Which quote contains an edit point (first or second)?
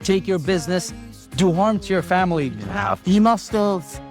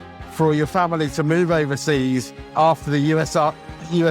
first